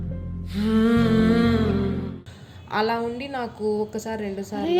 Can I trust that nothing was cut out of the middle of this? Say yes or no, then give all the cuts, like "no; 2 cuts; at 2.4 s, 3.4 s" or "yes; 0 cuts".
yes; 0 cuts